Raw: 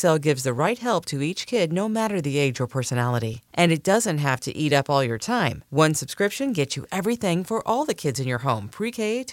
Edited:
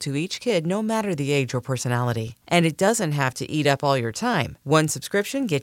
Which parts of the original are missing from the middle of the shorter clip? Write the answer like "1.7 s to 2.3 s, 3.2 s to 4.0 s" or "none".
none